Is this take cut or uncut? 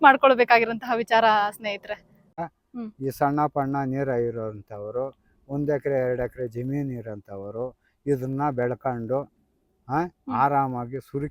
cut